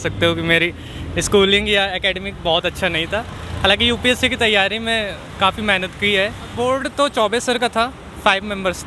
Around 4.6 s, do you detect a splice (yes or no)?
no